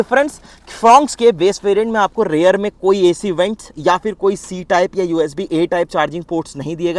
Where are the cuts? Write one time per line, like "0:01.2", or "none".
none

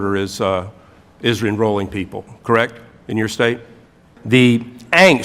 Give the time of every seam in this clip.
0:04.1

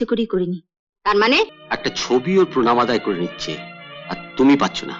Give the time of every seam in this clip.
0:01.6

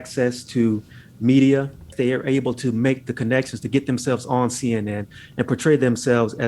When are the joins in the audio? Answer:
0:01.9
0:05.2

